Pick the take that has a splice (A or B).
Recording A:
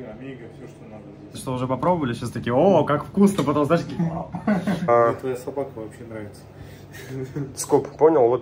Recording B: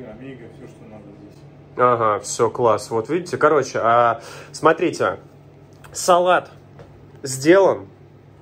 A